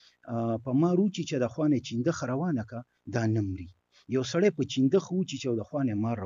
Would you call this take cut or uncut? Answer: uncut